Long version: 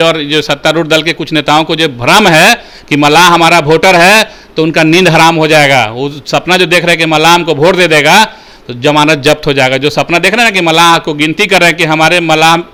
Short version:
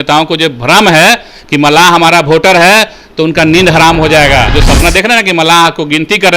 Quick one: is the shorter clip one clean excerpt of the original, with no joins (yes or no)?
no